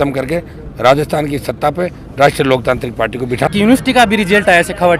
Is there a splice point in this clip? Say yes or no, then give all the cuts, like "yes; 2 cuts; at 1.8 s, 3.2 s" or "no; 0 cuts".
yes; 1 cut; at 3.5 s